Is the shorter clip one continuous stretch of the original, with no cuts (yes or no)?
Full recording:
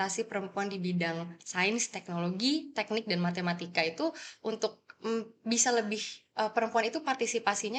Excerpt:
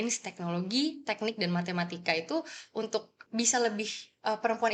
no